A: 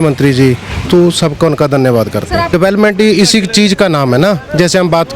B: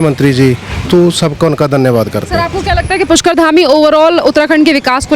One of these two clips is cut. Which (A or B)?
A